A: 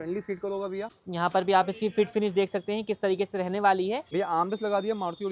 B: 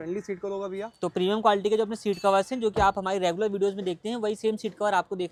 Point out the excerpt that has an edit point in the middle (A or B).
A